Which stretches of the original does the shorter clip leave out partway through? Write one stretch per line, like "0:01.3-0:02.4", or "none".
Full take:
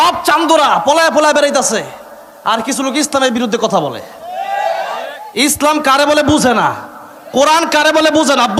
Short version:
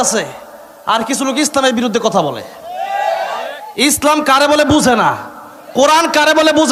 none